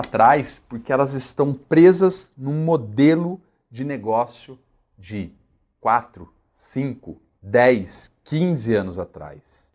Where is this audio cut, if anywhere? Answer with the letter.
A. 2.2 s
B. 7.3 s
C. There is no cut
C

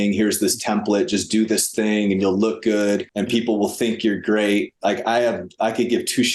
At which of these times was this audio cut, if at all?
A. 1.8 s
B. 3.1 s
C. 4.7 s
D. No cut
B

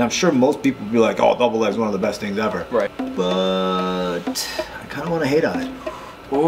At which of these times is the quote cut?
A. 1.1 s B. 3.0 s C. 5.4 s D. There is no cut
B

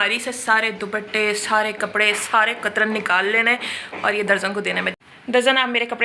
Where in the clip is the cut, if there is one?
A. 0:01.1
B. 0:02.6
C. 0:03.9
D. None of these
D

